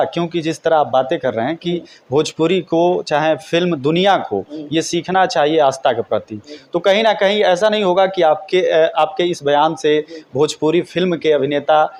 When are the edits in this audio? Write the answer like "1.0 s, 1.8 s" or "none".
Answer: none